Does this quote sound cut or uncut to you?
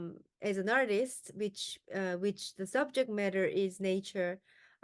uncut